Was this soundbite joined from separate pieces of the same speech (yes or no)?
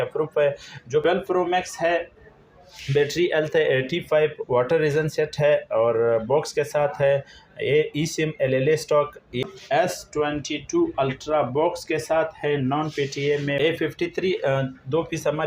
yes